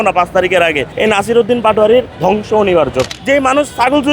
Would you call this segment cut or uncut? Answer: cut